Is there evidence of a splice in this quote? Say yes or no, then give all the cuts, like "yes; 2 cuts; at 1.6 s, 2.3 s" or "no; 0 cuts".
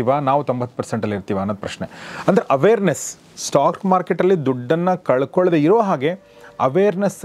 no; 0 cuts